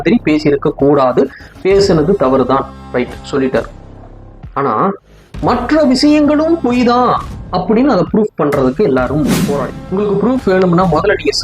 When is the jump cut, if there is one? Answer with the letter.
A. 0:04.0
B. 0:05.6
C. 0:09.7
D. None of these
C